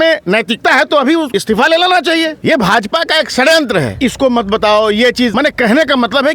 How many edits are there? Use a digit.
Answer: 4